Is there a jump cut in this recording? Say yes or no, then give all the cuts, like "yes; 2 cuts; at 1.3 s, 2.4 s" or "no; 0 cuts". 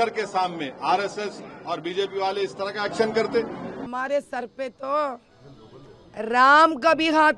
yes; 1 cut; at 3.7 s